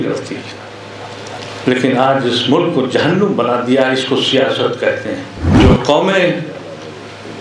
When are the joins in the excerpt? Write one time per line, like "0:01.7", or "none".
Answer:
0:05.4